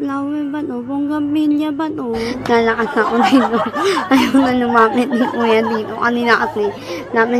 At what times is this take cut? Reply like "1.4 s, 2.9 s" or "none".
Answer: 2.3 s